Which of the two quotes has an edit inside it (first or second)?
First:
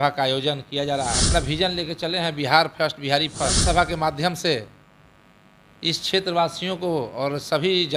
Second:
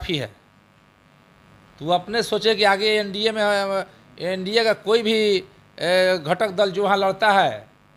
first